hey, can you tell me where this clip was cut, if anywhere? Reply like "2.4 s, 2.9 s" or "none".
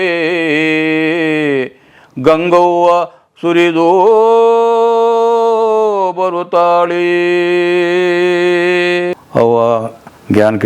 9.1 s